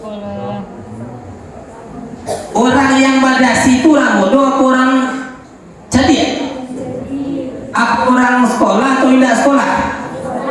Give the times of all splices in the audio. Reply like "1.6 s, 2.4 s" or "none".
none